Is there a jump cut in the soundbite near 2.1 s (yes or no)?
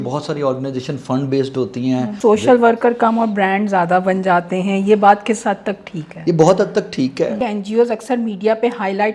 yes